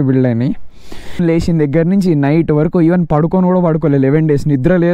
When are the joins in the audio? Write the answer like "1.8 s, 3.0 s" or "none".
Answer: 1.2 s